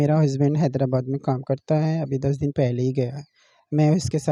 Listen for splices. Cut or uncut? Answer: uncut